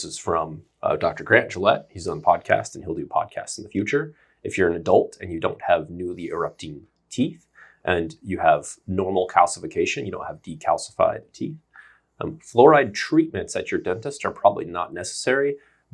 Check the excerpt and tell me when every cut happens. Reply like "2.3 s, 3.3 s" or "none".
none